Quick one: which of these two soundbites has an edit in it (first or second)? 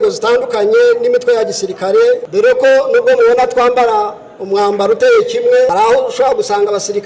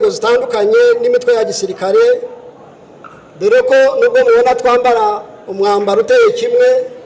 first